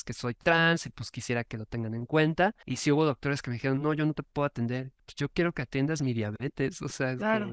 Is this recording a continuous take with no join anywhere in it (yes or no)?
no